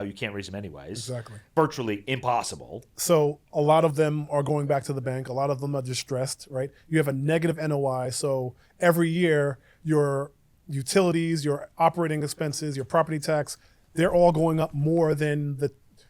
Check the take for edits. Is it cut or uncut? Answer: cut